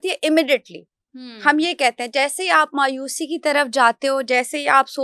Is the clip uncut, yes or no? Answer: yes